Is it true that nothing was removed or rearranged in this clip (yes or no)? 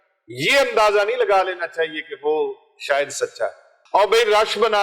no